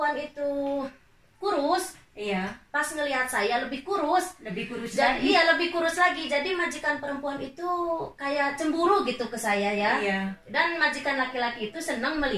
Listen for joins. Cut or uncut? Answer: uncut